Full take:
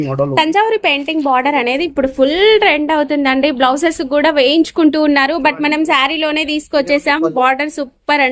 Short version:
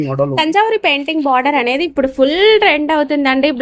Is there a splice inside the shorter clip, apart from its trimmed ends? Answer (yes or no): no